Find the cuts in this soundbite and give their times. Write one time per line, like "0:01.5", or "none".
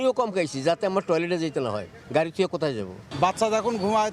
none

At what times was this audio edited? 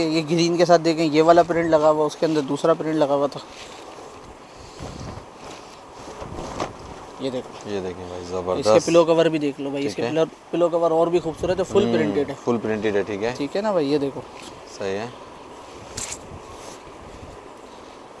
none

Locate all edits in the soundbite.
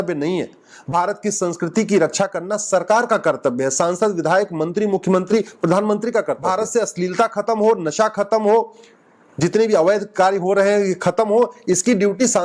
0:06.4

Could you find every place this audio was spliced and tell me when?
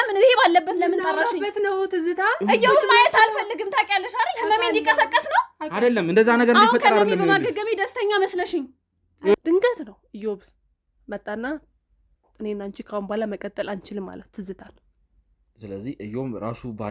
0:09.3

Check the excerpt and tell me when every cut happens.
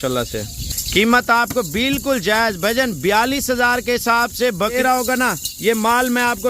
0:04.8

